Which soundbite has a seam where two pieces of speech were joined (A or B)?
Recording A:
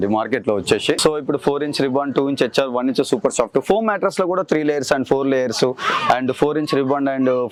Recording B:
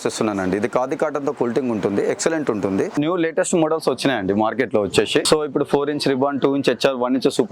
B